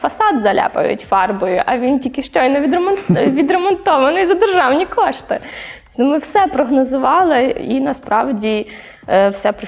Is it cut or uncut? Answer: uncut